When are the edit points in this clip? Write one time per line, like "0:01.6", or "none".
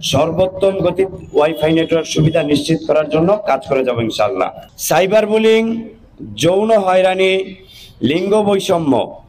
0:04.7